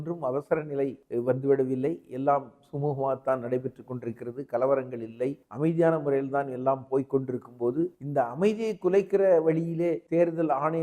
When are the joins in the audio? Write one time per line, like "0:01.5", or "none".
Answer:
0:01.0
0:05.5
0:08.0
0:10.0